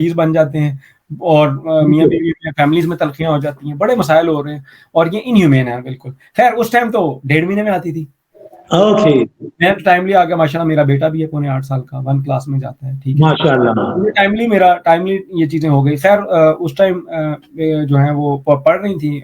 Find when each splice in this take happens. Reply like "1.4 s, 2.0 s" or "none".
none

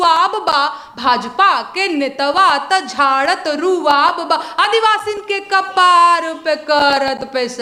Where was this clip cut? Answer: none

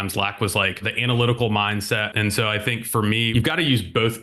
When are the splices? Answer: 2.1 s, 3.3 s

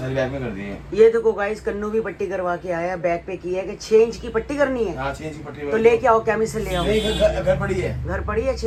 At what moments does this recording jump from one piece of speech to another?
none

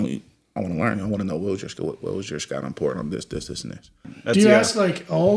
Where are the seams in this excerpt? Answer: 4.1 s

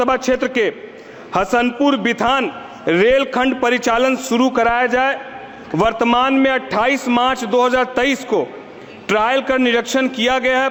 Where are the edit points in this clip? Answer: none

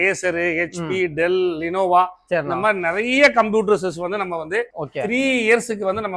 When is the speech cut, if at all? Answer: none

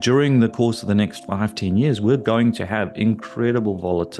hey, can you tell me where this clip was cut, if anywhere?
none

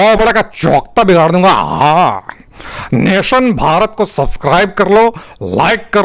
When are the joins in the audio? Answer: none

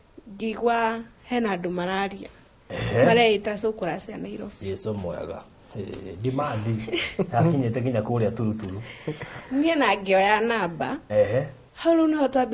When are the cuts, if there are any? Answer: 11.6 s

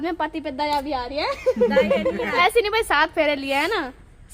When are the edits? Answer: 2.3 s

